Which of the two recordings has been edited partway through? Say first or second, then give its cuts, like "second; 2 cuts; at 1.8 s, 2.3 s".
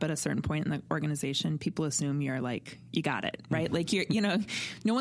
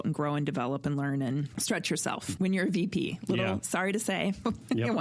second; 1 cut; at 1.8 s